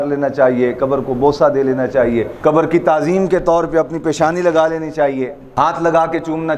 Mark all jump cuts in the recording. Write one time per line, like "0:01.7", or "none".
none